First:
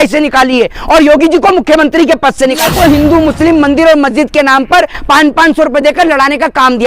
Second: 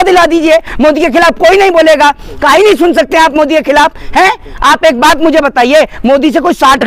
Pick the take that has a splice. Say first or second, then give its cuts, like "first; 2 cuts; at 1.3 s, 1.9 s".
first; 1 cut; at 2.7 s